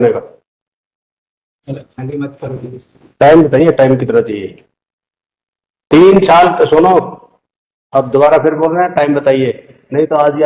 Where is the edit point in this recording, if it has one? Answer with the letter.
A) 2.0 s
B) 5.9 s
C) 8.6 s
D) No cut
B